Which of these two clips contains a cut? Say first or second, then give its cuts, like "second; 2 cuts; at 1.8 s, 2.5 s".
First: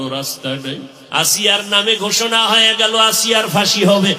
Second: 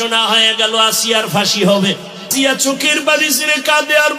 first; 1 cut; at 0.9 s